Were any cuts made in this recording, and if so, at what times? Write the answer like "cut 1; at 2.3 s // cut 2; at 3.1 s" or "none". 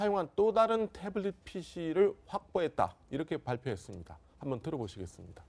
none